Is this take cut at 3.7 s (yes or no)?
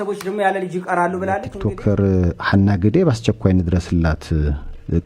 no